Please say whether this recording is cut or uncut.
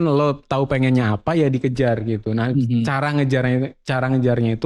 uncut